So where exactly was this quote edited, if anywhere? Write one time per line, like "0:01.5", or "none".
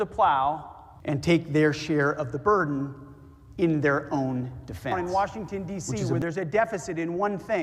0:04.9